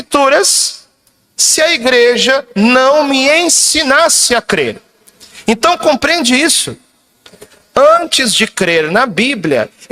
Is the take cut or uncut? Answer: cut